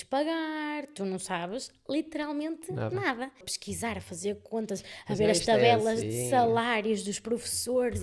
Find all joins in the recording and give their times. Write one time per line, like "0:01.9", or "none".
0:03.6